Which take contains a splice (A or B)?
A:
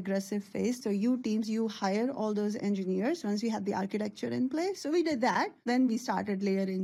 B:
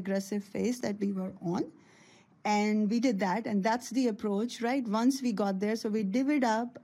A